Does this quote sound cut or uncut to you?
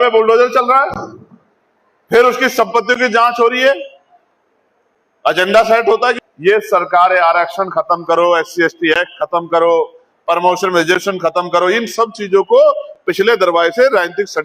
cut